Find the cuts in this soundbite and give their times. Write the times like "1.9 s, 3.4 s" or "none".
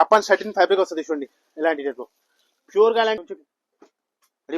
3.2 s